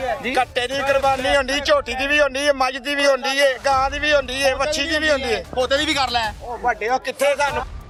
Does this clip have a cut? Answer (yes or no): no